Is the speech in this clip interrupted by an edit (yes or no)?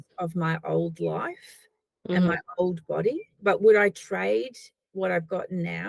yes